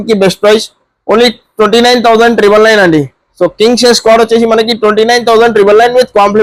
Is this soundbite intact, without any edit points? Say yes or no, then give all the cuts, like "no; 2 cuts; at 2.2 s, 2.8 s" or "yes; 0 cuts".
yes; 0 cuts